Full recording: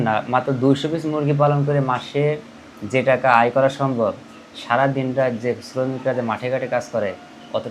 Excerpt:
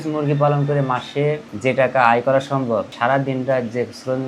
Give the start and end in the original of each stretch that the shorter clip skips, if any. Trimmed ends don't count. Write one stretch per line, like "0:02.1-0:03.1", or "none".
0:02.5-0:02.8
0:04.2-0:04.6